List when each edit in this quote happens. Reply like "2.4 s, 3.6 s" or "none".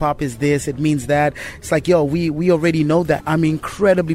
3.2 s